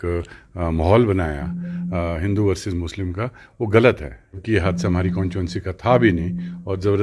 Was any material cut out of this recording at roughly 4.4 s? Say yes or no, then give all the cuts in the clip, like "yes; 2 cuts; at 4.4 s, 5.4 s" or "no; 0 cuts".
yes; 1 cut; at 4.4 s